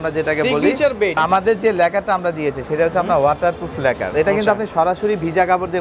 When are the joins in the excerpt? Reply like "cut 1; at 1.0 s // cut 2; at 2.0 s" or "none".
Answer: cut 1; at 1.2 s // cut 2; at 4.0 s

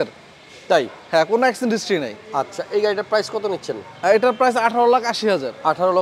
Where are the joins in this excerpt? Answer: none

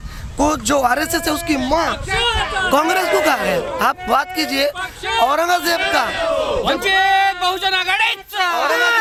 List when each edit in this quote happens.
none

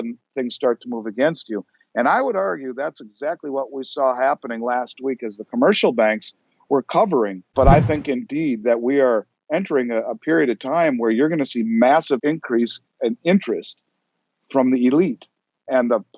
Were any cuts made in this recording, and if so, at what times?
cut 1; at 7.4 s

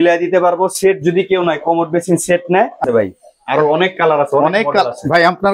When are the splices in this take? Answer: cut 1; at 2.8 s

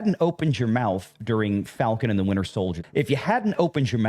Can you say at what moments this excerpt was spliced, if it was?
cut 1; at 2.8 s

